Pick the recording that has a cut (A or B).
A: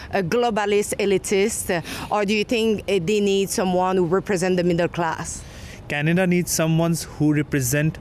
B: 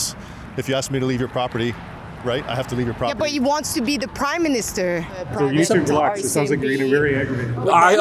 B